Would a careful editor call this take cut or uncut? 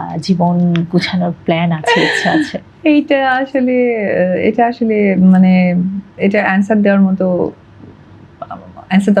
uncut